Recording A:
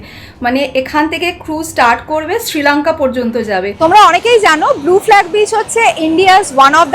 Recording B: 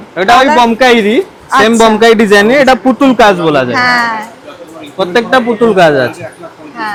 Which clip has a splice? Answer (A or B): A